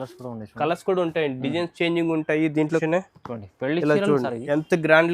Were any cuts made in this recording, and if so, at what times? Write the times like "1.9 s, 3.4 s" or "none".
2.8 s